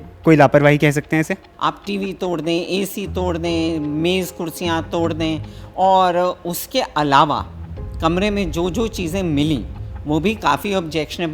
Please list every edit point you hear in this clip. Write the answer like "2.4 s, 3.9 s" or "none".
1.5 s